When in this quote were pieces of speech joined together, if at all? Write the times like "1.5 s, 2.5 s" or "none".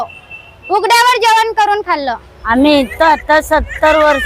2.3 s